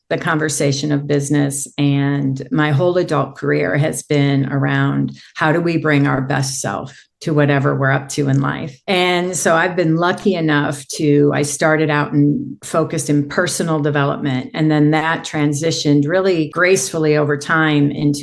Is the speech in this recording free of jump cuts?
yes; 0 cuts

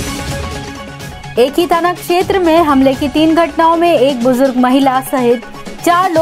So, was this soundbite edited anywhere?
yes; 1 cut; at 1.2 s

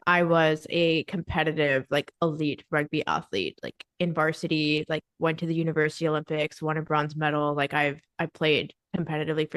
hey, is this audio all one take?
yes; 0 cuts

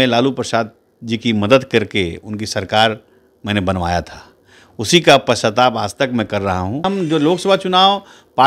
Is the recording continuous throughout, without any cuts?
no; 1 cut; at 6.9 s

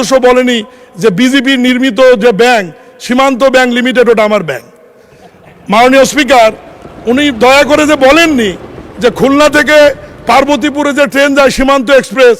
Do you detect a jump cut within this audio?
no; 0 cuts

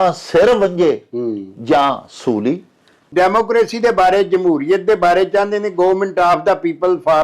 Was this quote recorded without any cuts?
no; 1 cut; at 3.0 s

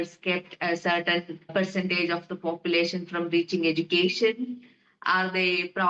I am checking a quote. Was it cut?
yes; 1 cut; at 1.4 s

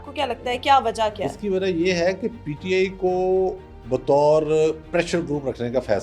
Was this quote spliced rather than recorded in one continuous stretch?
no; 0 cuts

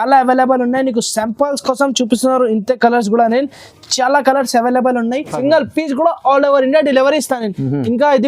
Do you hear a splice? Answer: yes; 1 cut; at 5.3 s

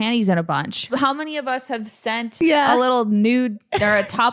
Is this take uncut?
no; 2 cuts; at 0.9 s, 2.3 s

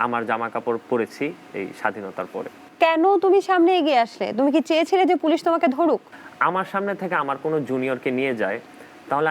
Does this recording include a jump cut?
yes; 2 cuts; at 2.7 s, 6.1 s

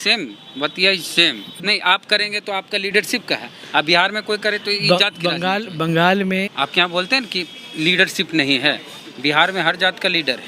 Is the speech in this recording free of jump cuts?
no; 2 cuts; at 1.5 s, 6.5 s

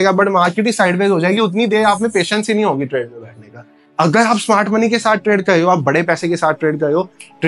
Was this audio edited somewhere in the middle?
no; 0 cuts

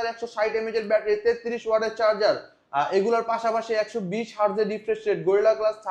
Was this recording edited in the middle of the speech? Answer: no; 0 cuts

